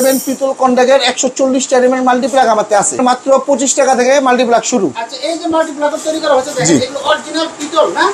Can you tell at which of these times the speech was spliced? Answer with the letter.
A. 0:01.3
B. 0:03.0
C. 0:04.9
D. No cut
B